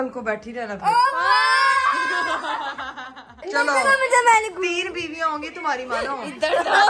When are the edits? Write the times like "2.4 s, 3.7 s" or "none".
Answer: none

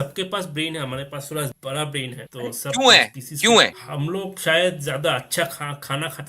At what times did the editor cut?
1.6 s, 2.2 s, 3.9 s

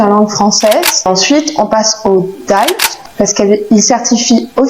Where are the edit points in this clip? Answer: 1.1 s, 2.9 s

